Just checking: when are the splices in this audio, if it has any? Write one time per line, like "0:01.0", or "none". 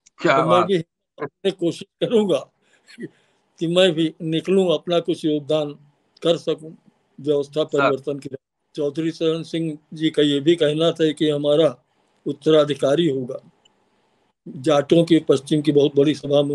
0:08.6